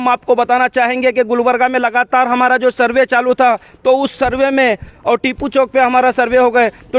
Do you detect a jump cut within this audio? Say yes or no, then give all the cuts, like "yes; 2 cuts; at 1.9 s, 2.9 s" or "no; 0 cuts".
yes; 1 cut; at 4.8 s